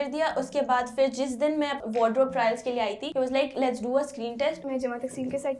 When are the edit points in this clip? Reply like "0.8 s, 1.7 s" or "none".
1.8 s, 3.0 s, 4.6 s

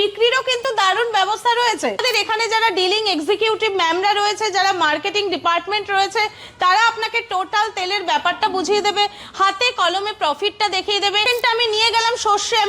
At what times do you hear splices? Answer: 2.0 s, 11.3 s

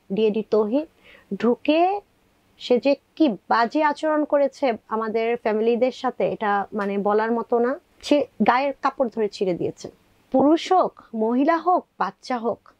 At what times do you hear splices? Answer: 7.9 s, 10.1 s

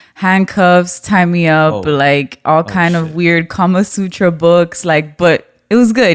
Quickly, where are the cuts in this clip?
none

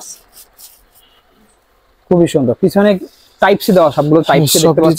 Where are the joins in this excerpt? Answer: none

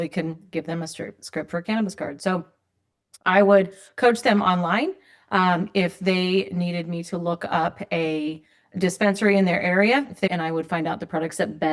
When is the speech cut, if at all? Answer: none

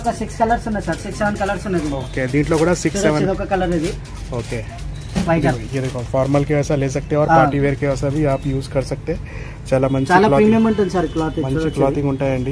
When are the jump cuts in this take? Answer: none

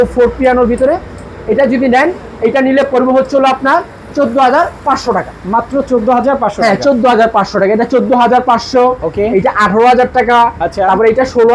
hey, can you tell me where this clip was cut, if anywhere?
none

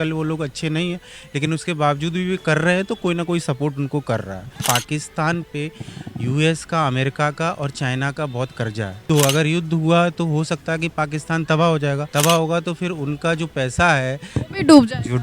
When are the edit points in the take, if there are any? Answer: 4.6 s, 9.0 s, 12.0 s

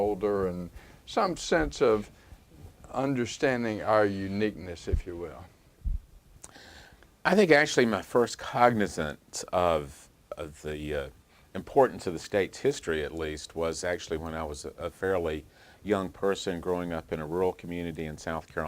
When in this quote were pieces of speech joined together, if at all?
7.5 s

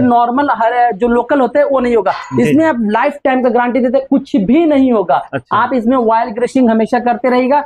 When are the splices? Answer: none

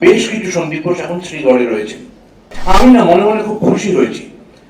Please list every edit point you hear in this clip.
2.5 s

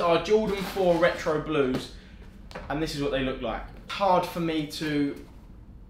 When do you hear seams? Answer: 3.9 s

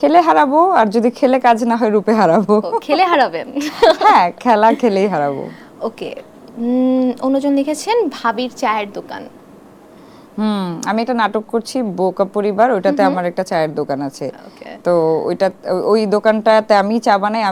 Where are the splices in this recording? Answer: none

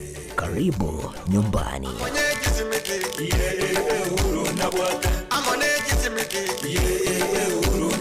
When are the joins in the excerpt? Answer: 1.9 s

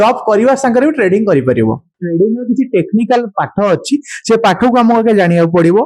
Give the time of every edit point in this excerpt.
1.9 s

